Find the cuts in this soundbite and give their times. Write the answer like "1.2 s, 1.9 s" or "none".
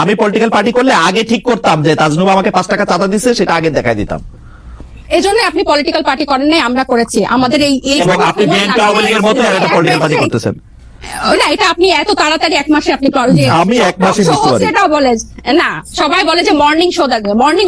none